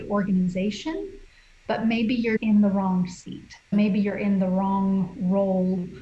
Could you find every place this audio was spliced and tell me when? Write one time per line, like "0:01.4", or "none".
0:02.4
0:03.7

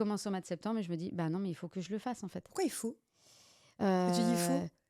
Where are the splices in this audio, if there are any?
none

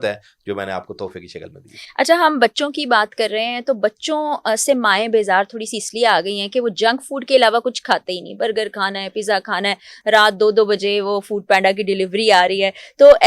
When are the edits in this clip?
none

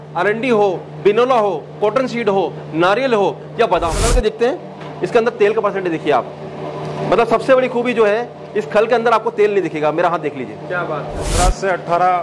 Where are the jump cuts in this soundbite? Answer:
0:04.1
0:11.3

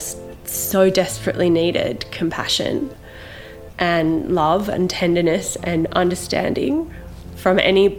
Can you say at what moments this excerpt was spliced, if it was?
none

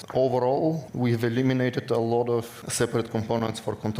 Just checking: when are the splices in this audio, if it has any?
0:00.9
0:02.6

